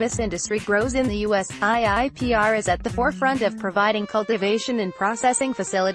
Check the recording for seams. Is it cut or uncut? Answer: uncut